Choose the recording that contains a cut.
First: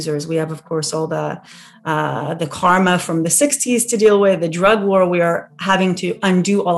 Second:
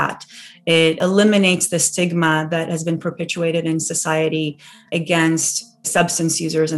second; 3 cuts; at 1.0 s, 4.8 s, 5.9 s

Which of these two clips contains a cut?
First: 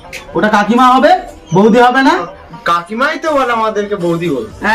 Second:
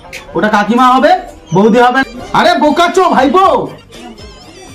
second; 1 cut; at 2.0 s

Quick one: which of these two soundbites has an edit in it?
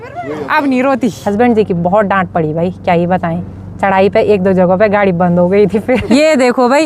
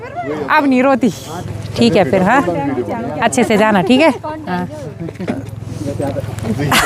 first; 2 cuts; at 1.2 s, 6.1 s

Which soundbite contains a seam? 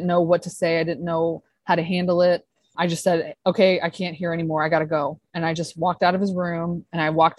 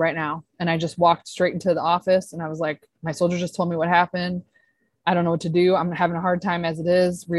first; 1 cut; at 2.7 s

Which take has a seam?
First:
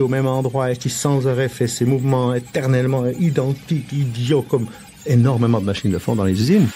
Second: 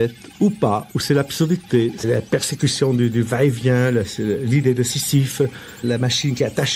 second; 2 cuts; at 2.0 s, 5.8 s

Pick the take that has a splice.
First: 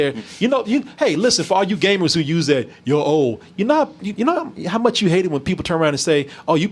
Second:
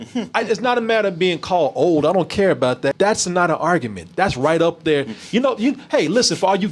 second; 1 cut; at 2.9 s

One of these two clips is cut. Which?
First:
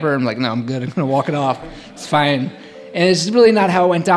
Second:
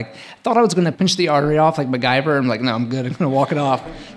second; 1 cut; at 0.9 s

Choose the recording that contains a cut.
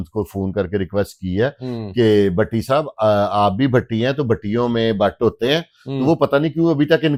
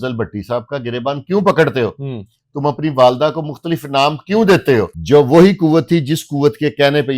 second; 1 cut; at 5.0 s

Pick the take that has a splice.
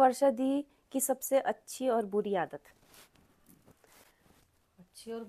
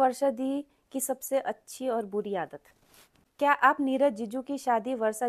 second; 1 cut; at 3.3 s

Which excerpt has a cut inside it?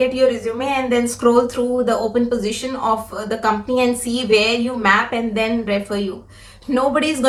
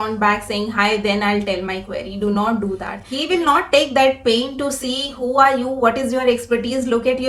second; 1 cut; at 3.0 s

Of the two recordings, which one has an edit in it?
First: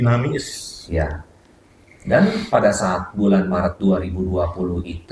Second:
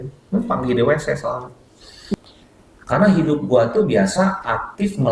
second; 1 cut; at 2.1 s

